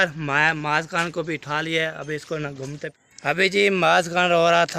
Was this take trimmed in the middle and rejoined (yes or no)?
yes